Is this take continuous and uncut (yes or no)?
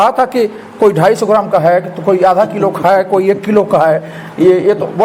yes